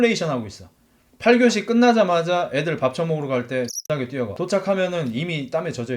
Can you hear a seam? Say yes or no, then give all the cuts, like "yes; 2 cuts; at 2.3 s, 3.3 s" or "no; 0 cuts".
yes; 1 cut; at 4.3 s